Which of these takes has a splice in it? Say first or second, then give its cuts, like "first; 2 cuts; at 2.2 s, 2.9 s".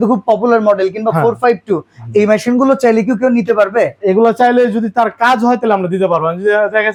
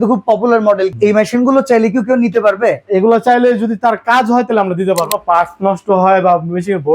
second; 2 cuts; at 0.9 s, 5.0 s